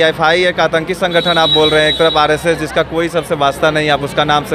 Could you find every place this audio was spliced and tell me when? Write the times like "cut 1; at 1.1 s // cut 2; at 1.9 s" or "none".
none